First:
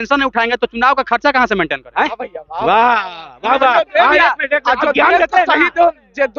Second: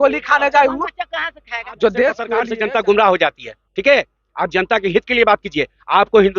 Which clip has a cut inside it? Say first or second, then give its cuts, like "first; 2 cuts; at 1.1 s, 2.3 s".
second; 1 cut; at 2.4 s